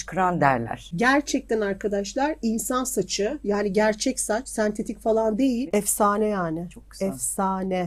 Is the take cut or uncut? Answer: cut